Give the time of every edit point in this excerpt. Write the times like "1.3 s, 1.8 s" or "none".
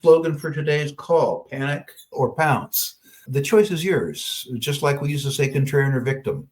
2.1 s, 3.2 s